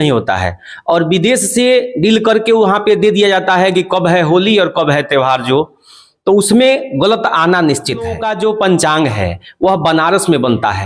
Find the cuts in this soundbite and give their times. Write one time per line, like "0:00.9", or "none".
0:08.2